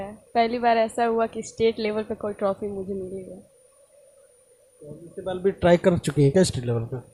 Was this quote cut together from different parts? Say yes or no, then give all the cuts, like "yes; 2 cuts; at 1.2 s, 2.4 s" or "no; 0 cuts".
no; 0 cuts